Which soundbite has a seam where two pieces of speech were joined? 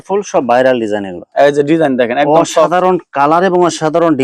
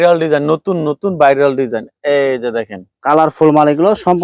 first; 1 cut; at 1.2 s

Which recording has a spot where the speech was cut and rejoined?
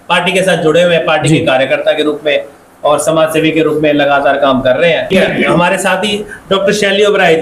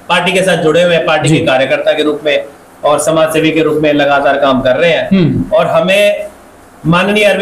first; 1 cut; at 5.1 s

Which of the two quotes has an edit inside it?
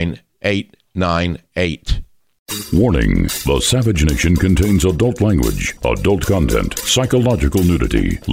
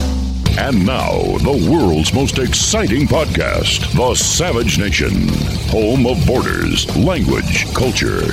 first; 1 cut; at 2.4 s

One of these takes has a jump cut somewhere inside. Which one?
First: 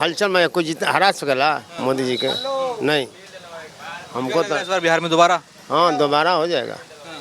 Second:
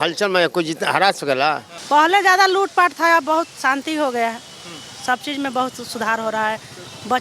second; 1 cut; at 1.7 s

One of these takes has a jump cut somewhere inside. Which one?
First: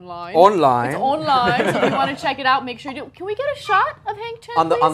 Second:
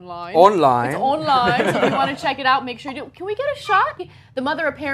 first; 1 cut; at 4.0 s

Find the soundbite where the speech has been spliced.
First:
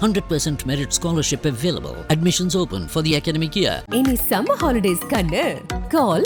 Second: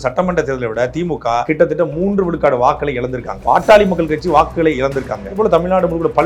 second; 3 cuts; at 1.4 s, 3.4 s, 5.4 s

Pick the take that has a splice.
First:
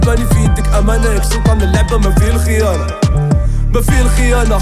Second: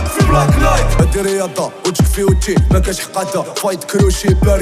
second; 1 cut; at 1.0 s

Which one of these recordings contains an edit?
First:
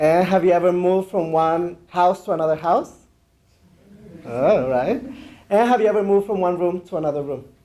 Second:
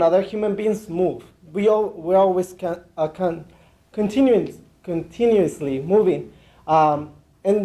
first; 1 cut; at 2.9 s

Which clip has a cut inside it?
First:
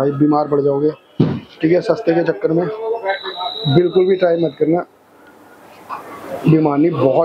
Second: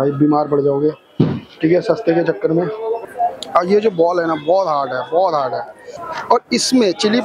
second; 2 cuts; at 3.0 s, 5.8 s

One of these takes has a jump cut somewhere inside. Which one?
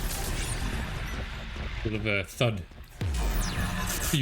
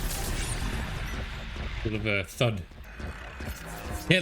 second; 1 cut; at 2.8 s

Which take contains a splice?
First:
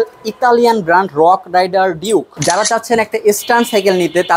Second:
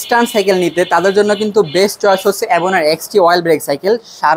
first; 1 cut; at 2.3 s

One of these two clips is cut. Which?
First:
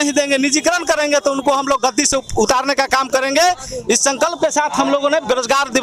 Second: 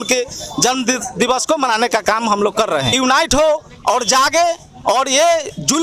second; 1 cut; at 2.9 s

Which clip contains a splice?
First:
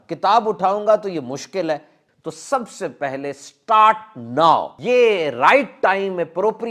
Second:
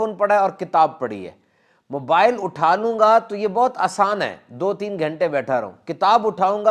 first; 2 cuts; at 2.0 s, 4.7 s

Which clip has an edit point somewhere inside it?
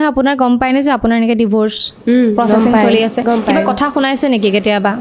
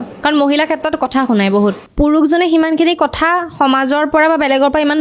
second; 1 cut; at 1.8 s

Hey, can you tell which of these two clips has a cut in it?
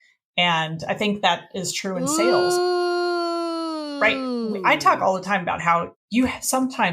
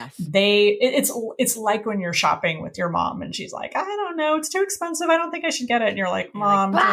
first; 1 cut; at 6.0 s

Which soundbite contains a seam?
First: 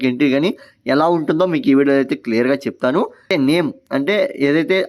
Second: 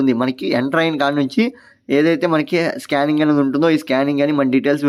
first; 1 cut; at 3.3 s

